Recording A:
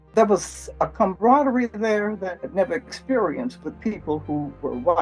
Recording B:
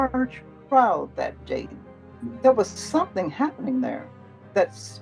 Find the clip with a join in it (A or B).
A